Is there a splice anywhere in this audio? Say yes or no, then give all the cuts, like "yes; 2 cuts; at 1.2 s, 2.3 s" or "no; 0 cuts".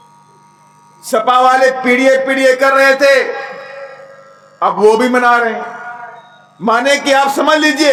no; 0 cuts